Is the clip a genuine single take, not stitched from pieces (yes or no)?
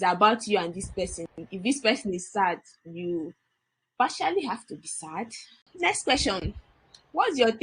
no